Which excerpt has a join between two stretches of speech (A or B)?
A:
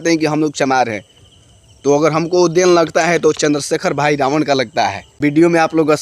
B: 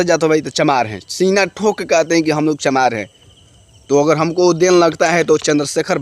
A